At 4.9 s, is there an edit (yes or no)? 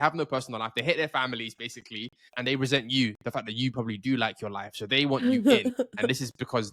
no